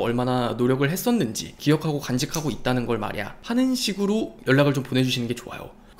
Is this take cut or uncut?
cut